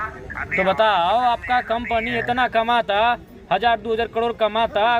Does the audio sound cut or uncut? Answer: uncut